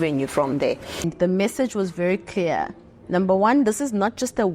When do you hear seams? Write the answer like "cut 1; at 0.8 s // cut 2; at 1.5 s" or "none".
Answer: cut 1; at 1.1 s